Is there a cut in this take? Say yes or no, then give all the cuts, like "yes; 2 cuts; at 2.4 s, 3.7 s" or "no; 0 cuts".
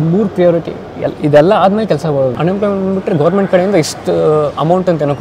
yes; 1 cut; at 2.4 s